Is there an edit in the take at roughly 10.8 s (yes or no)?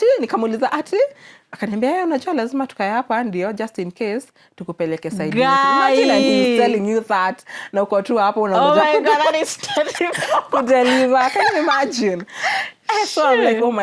no